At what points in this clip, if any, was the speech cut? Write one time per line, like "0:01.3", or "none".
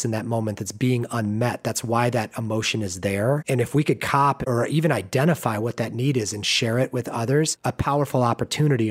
0:04.5
0:07.6